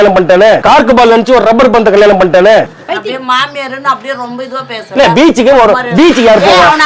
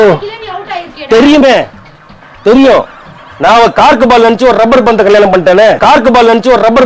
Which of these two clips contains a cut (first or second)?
first